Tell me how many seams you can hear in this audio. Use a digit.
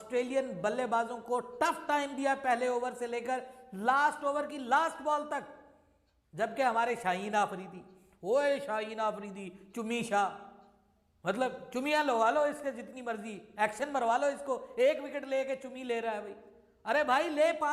0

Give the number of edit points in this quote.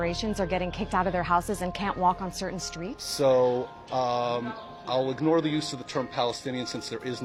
0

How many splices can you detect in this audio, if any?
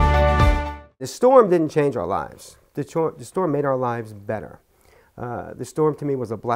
1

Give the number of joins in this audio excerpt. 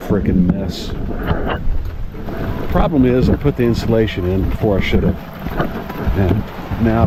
0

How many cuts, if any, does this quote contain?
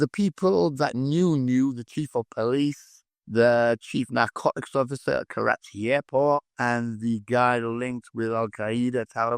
1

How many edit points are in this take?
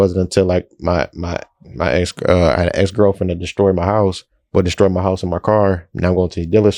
0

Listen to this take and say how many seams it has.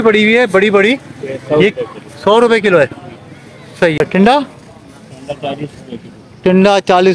1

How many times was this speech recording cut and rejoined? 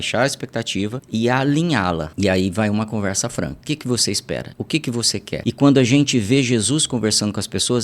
5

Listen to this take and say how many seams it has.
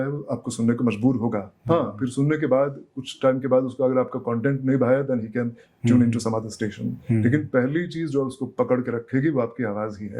0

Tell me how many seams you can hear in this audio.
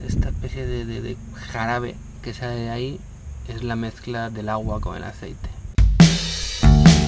1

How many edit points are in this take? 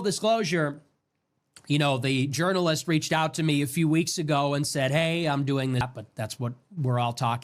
1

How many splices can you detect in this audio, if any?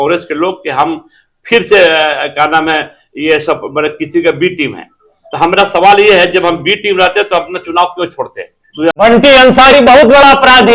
1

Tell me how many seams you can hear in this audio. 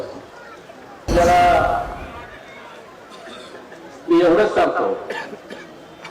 1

